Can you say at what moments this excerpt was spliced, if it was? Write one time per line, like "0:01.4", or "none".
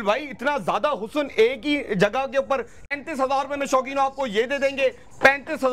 0:02.9